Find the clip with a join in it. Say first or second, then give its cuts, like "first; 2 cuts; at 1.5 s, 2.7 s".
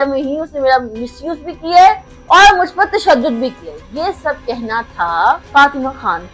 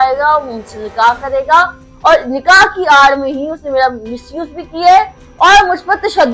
first; 1 cut; at 5.4 s